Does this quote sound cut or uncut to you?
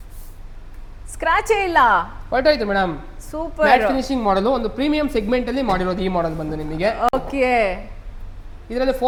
uncut